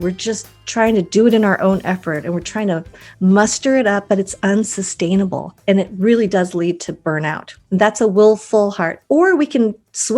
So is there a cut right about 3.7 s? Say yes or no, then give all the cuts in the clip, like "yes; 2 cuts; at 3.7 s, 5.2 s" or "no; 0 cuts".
no; 2 cuts; at 5.5 s, 7.5 s